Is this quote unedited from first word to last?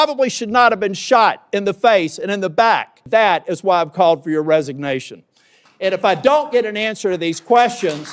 no; 1 cut; at 3.0 s

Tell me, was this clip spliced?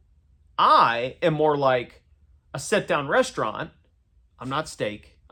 no; 0 cuts

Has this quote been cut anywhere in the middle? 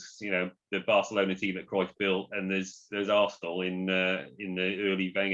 no; 0 cuts

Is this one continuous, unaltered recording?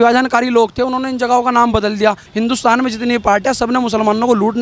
no; 1 cut; at 2.2 s

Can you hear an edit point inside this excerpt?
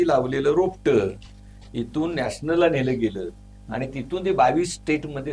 no; 0 cuts

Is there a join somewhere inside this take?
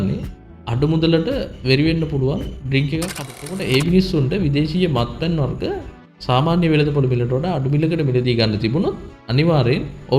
yes; 1 cut; at 3.2 s

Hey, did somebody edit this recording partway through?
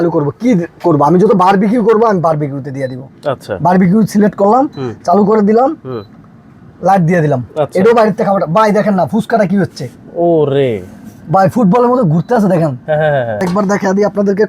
yes; 1 cut; at 13.5 s

